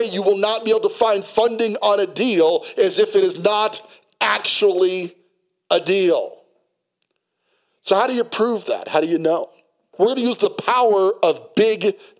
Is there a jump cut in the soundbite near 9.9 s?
yes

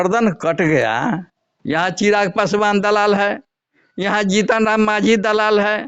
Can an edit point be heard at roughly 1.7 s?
yes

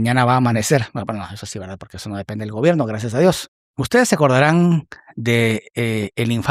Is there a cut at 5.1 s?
no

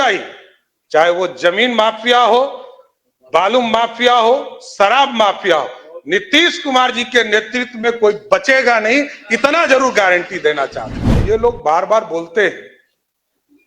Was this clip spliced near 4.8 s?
no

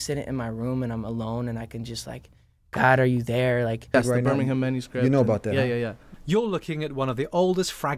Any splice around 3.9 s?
yes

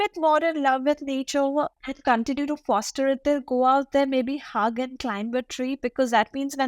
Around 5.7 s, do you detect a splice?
no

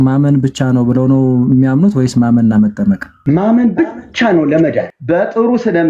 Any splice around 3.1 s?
yes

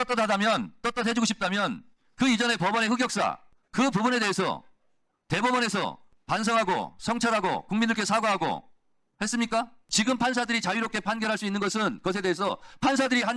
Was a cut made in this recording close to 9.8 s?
yes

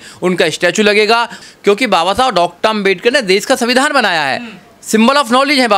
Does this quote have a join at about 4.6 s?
no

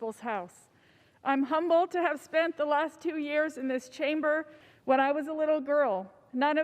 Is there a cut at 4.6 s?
yes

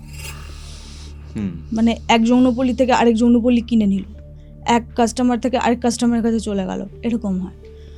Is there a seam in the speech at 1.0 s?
no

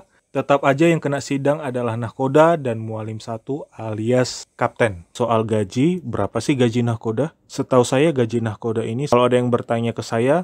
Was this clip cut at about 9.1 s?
yes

